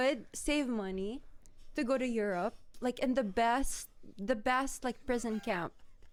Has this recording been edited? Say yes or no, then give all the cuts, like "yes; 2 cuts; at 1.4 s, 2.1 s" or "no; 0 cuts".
no; 0 cuts